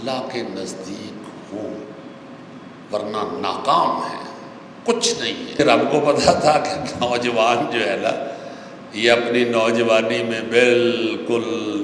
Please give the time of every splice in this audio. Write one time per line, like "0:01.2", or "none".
0:05.6